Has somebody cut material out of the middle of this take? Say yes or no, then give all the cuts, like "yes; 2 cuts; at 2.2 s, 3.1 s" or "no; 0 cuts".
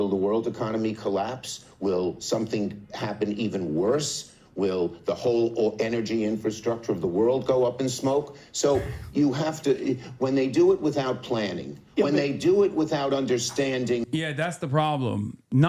no; 0 cuts